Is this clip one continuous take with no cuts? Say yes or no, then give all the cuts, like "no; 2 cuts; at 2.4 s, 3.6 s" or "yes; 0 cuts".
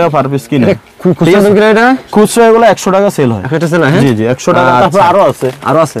yes; 0 cuts